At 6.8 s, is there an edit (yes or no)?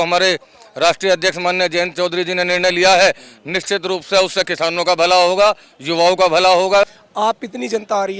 yes